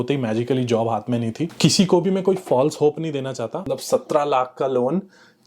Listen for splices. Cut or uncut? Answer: cut